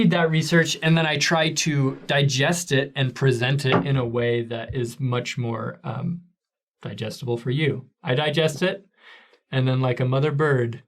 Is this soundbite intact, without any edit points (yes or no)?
yes